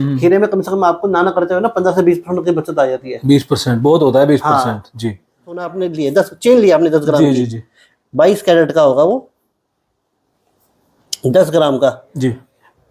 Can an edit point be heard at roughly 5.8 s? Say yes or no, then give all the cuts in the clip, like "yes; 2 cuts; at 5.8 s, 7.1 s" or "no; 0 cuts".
yes; 1 cut; at 5.8 s